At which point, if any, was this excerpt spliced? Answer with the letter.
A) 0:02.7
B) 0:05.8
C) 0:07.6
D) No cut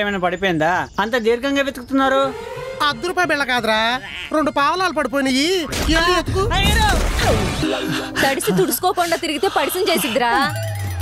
C